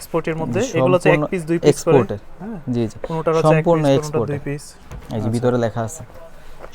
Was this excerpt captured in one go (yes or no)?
yes